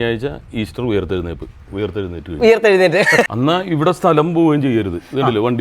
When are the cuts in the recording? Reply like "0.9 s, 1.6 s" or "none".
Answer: 3.3 s